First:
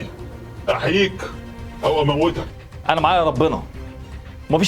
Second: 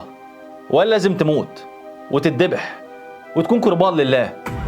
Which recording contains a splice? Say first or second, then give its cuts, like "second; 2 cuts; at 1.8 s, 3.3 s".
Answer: first; 1 cut; at 2.5 s